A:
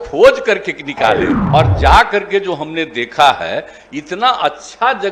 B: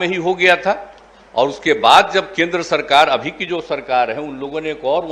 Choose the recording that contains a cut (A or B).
A